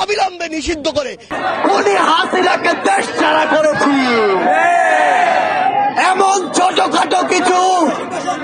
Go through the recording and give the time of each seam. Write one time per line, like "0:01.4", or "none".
0:01.3

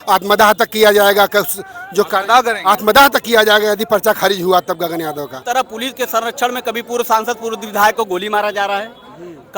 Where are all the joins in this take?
0:05.4

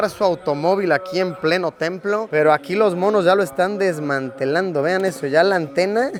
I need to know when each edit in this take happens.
none

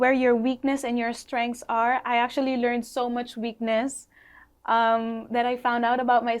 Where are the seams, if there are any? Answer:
none

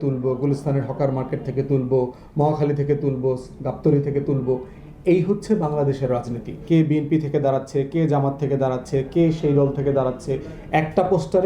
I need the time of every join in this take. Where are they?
0:06.6

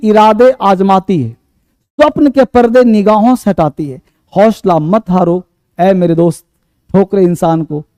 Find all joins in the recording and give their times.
none

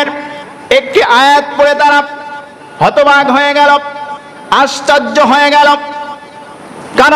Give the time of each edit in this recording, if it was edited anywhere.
none

